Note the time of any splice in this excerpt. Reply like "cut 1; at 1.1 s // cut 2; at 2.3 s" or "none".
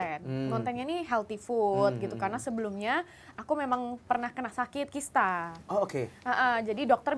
none